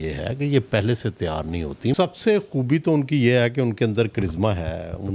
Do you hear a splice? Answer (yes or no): yes